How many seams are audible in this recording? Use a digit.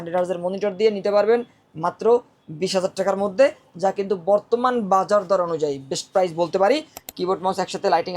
1